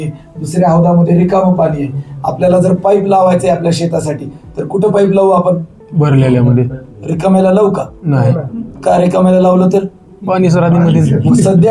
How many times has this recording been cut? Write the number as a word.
zero